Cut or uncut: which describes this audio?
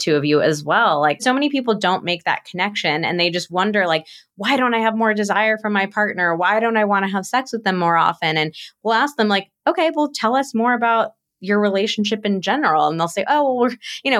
cut